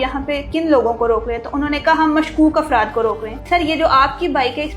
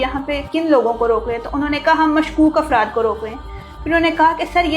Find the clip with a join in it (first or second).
first